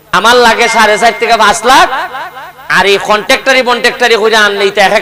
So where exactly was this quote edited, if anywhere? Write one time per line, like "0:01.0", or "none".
none